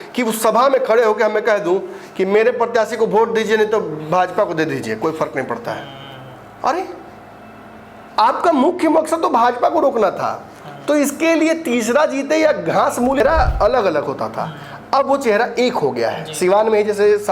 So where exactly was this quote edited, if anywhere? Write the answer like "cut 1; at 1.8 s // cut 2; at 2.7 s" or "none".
cut 1; at 13.2 s